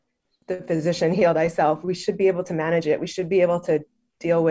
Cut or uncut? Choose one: uncut